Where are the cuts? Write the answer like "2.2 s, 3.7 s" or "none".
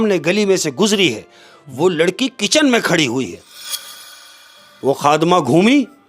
4.2 s

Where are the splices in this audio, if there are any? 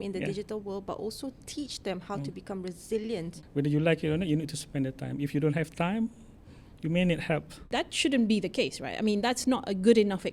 3.3 s, 7.6 s

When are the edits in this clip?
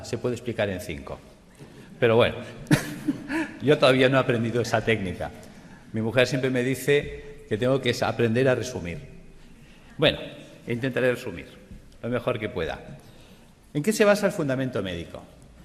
3.8 s

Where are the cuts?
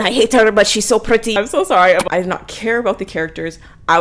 2.0 s

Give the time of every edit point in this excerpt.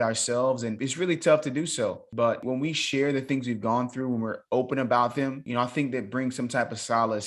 0.8 s, 2.4 s, 5.4 s

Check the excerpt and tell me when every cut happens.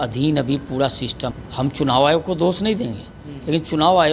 1.4 s

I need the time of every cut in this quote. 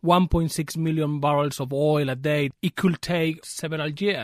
2.5 s, 3.4 s

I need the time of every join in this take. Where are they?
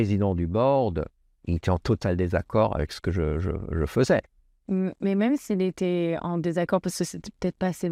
none

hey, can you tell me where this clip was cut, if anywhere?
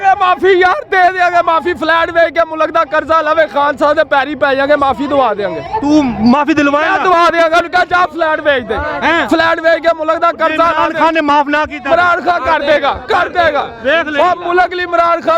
none

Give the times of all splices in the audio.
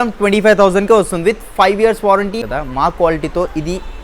2.4 s

